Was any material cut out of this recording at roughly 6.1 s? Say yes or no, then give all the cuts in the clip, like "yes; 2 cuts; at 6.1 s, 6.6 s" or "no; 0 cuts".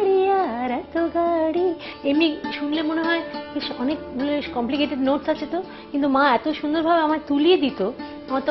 no; 1 cut; at 1.9 s